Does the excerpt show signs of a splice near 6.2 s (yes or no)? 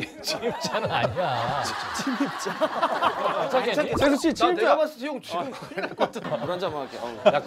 yes